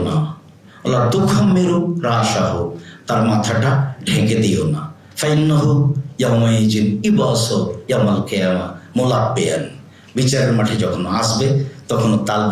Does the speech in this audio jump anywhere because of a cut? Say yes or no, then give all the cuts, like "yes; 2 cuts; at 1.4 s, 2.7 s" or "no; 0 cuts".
no; 0 cuts